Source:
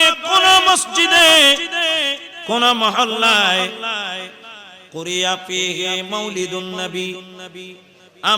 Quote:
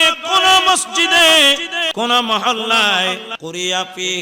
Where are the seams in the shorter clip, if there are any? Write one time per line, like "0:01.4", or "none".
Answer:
0:01.8
0:03.3